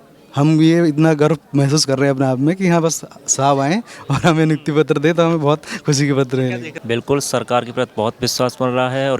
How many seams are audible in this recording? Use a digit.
1